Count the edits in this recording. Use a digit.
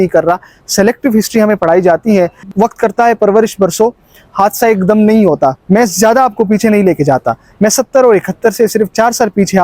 1